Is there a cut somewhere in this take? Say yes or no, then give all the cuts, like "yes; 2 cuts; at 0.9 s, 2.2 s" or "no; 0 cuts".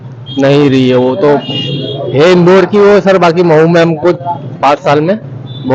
no; 0 cuts